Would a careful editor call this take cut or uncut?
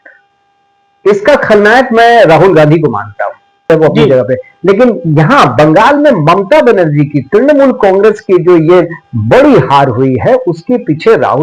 cut